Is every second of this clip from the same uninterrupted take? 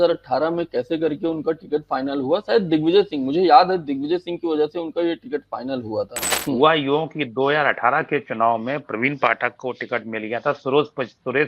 no; 1 cut; at 6.2 s

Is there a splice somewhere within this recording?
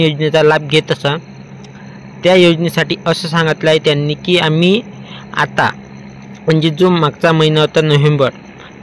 no; 0 cuts

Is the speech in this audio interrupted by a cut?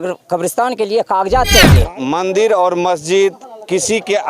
yes; 1 cut; at 1.8 s

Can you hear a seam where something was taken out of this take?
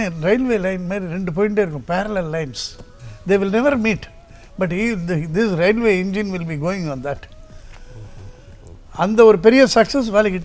no; 0 cuts

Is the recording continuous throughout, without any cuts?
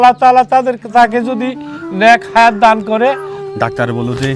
no; 1 cut; at 3.3 s

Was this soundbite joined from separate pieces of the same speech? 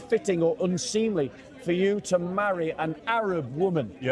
yes; 1 cut; at 3.0 s

